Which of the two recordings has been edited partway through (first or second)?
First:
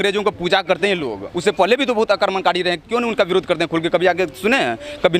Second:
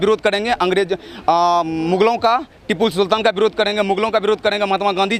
first